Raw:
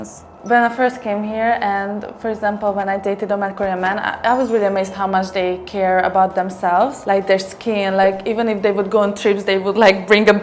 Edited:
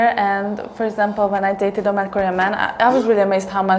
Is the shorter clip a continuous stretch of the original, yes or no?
yes